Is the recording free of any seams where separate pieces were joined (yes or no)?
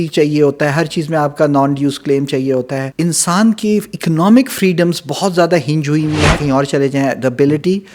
no